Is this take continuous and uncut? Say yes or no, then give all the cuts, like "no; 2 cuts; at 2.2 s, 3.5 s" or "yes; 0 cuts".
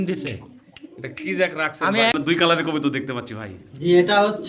no; 1 cut; at 2.1 s